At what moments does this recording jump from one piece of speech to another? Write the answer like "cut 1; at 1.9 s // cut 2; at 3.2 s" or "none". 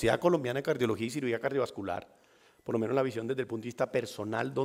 none